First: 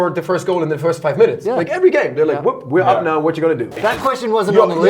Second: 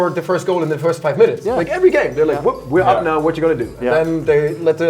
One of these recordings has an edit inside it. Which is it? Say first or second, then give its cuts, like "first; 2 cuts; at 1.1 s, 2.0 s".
first; 1 cut; at 3.7 s